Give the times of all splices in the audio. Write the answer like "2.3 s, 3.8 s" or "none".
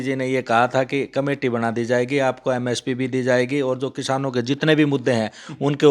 none